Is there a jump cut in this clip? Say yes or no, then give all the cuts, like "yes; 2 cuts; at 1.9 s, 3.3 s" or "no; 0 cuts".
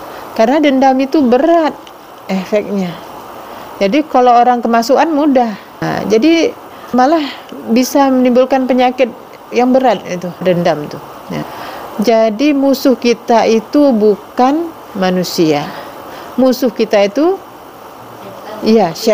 yes; 4 cuts; at 5.9 s, 6.9 s, 10.4 s, 11.6 s